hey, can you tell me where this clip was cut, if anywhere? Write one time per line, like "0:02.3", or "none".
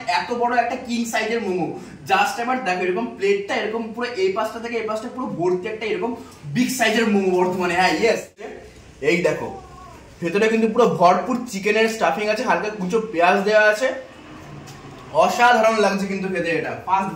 0:08.5

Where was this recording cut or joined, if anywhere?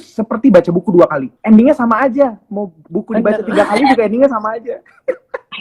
0:01.3

